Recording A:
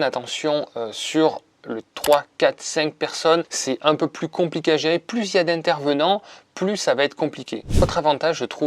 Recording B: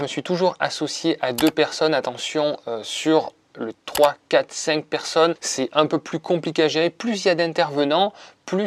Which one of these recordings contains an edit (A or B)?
A